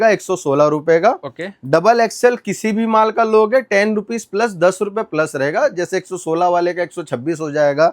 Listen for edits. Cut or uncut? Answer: uncut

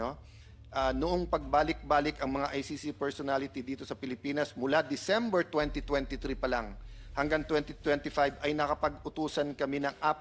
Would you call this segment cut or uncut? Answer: uncut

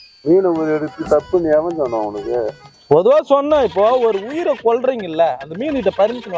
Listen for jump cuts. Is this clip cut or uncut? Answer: cut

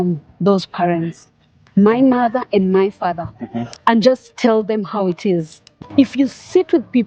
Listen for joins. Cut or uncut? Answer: cut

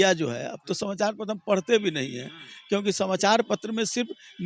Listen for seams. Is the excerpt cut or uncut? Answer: uncut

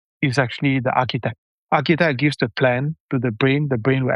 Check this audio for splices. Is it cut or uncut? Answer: cut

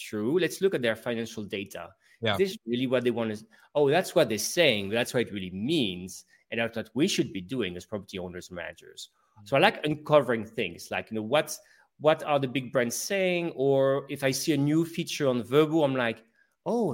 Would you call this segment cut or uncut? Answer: uncut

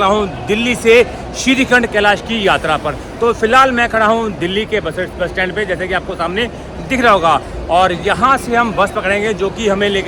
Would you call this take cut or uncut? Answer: uncut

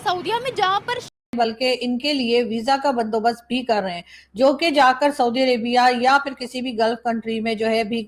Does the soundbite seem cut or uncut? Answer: cut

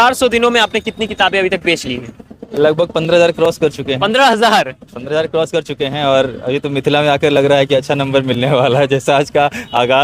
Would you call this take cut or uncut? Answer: uncut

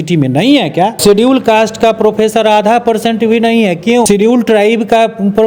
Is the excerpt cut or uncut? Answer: cut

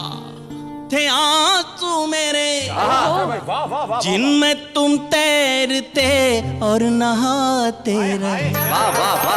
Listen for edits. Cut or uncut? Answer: uncut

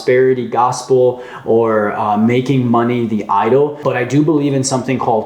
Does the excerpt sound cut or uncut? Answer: cut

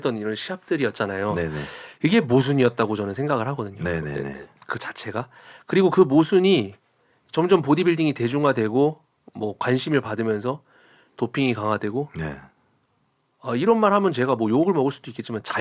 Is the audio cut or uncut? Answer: uncut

